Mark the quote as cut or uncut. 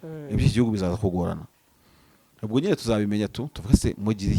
uncut